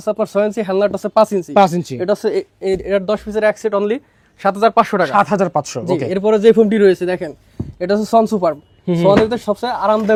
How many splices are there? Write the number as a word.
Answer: zero